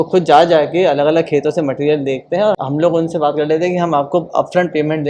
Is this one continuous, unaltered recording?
no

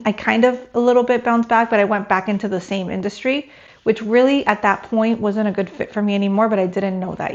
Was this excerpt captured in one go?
yes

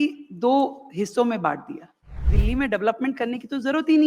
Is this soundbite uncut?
no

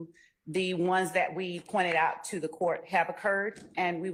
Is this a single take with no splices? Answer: yes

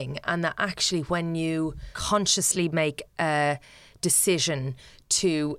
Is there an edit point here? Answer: yes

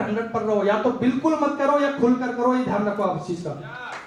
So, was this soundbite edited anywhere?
no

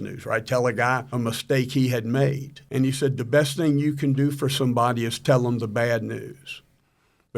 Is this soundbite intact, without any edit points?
no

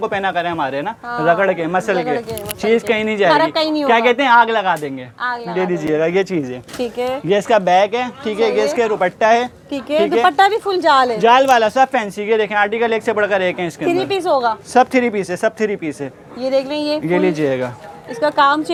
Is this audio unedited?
yes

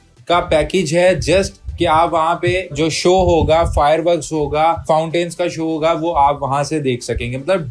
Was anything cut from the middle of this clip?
no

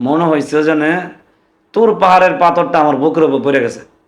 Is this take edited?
no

